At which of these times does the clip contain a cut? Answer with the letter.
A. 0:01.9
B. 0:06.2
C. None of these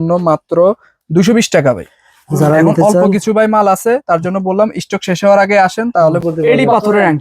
B